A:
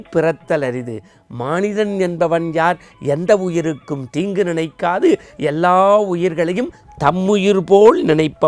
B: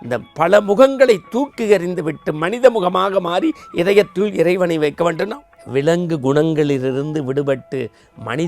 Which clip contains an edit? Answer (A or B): B